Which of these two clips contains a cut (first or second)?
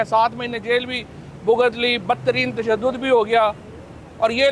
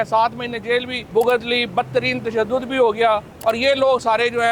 second